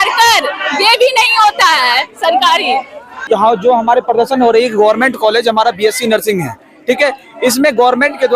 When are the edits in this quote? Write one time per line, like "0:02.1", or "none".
none